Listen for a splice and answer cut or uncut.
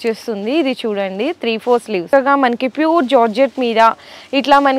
cut